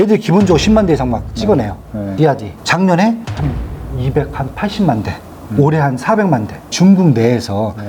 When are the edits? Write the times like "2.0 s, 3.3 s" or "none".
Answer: 2.3 s, 3.3 s, 6.7 s